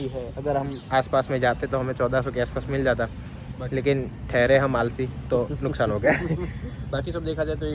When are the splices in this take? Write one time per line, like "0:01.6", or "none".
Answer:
none